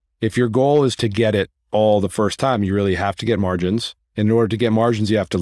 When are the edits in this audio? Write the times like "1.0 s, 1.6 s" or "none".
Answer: 1.0 s, 4.0 s